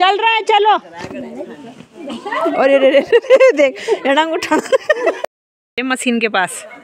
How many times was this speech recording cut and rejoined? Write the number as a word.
one